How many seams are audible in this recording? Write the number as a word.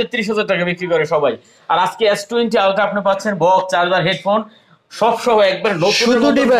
zero